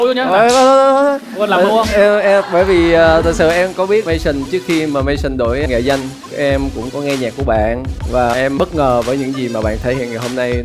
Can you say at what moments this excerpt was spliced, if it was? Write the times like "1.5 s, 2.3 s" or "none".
none